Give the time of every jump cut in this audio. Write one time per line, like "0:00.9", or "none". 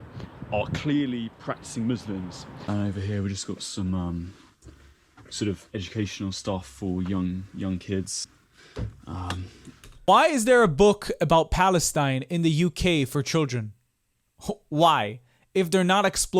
0:02.6